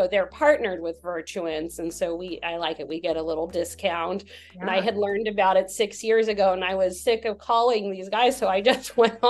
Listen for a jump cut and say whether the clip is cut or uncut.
uncut